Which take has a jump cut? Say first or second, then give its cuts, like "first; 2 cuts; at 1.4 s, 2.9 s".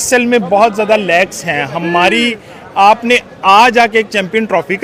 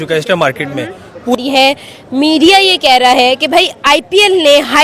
second; 1 cut; at 1.4 s